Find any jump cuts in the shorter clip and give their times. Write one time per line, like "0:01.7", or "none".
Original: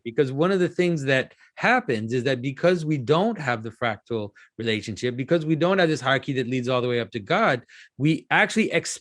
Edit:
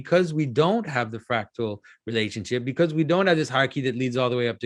none